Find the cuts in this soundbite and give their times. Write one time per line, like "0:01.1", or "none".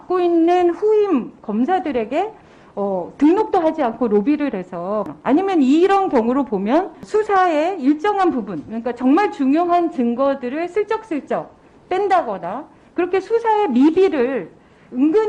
0:05.1
0:07.0